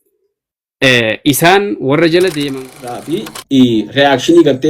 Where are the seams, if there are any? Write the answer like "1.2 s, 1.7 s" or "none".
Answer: 2.9 s